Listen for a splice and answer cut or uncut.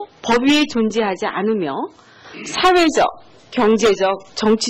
uncut